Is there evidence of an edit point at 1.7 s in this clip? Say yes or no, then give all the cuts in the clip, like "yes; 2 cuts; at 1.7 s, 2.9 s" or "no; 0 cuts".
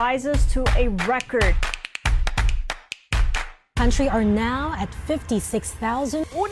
no; 0 cuts